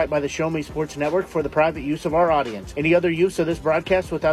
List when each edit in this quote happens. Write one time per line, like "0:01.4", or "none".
none